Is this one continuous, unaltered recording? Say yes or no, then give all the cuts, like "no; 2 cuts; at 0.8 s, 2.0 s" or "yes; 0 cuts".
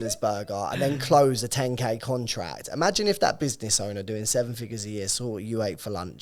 yes; 0 cuts